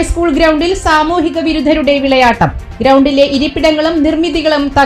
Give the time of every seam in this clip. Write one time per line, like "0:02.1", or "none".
none